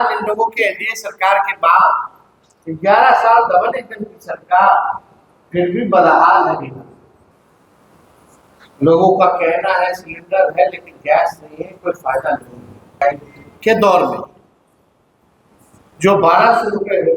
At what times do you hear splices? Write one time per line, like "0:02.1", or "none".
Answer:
0:07.3
0:13.0